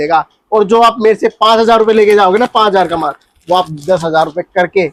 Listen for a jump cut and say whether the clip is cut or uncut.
uncut